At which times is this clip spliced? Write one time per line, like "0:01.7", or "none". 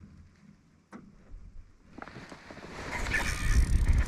none